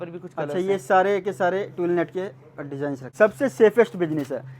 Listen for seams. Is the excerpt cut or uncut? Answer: cut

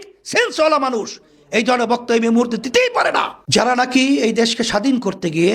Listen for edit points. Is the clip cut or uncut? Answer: cut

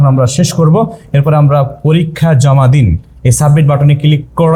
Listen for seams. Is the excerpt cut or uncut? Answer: uncut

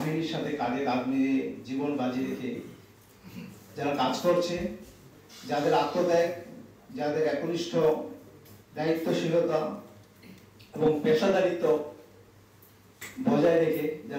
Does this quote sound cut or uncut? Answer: uncut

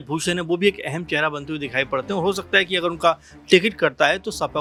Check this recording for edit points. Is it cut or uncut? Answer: uncut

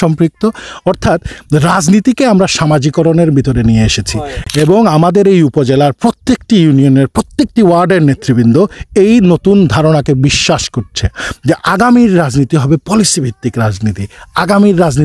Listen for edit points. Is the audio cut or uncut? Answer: uncut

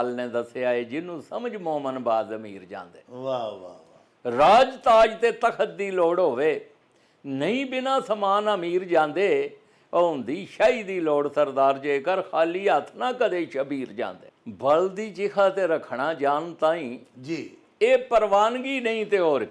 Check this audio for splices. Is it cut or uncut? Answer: cut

